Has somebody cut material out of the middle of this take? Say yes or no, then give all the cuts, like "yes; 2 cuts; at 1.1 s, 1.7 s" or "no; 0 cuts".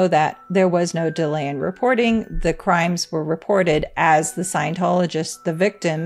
no; 0 cuts